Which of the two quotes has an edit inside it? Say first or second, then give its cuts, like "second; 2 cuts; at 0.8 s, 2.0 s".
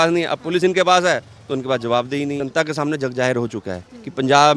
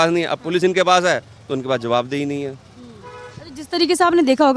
first; 1 cut; at 2.4 s